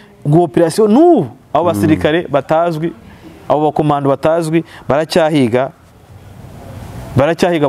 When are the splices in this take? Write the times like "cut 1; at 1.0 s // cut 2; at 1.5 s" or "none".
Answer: none